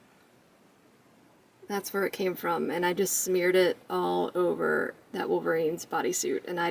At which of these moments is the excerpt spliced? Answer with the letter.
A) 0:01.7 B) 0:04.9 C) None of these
C